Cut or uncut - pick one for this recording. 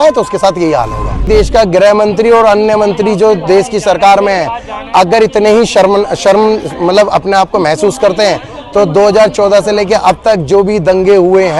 cut